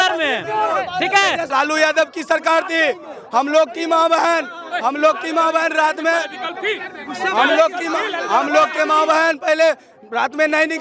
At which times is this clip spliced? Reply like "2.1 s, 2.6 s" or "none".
1.5 s

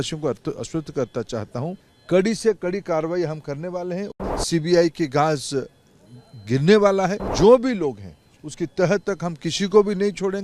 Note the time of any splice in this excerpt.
1.9 s, 4.1 s, 7.2 s

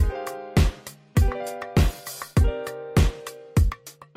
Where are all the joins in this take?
2.7 s

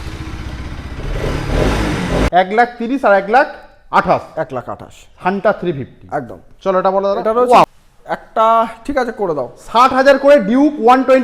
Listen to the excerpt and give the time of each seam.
2.3 s, 7.6 s

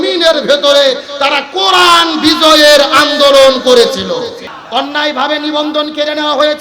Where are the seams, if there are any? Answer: 4.5 s

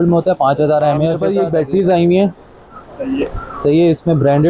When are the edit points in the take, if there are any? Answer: 1.2 s

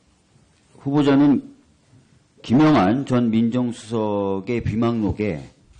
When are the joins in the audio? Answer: 2.4 s

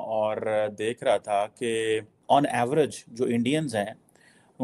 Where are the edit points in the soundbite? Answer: 2.1 s

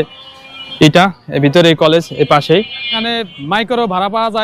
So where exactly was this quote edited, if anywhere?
3.0 s

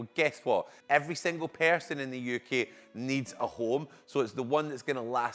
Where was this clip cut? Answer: none

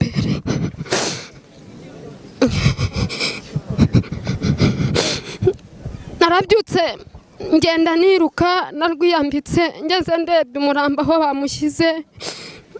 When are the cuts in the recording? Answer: none

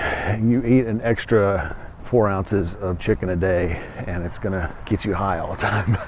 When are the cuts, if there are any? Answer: 2.0 s, 4.8 s

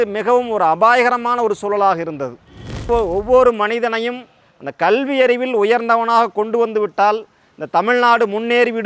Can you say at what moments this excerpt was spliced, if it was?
2.9 s

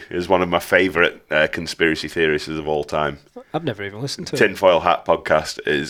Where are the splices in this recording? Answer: none

